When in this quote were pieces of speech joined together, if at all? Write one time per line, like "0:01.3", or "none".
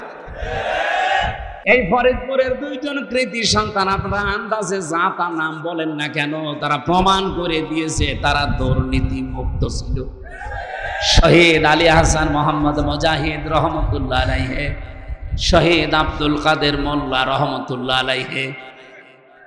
0:01.5